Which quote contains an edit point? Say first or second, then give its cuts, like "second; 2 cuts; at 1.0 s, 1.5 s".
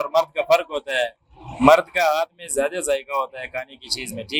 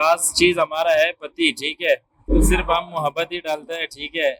second; 1 cut; at 2.2 s